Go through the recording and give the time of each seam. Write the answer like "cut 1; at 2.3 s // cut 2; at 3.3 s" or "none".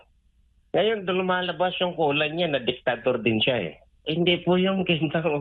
cut 1; at 4.0 s